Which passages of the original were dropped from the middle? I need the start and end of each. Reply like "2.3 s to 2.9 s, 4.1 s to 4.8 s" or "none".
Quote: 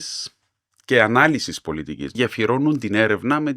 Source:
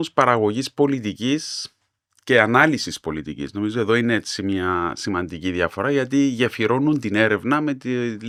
3.5 s to 6.3 s